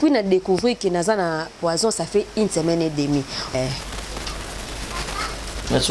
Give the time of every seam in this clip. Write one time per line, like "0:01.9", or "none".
0:03.5